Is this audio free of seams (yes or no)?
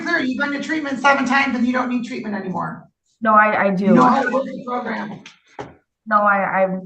yes